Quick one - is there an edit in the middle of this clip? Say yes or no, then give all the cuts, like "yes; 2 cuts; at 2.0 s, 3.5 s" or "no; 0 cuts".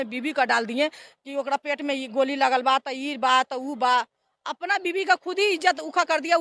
no; 0 cuts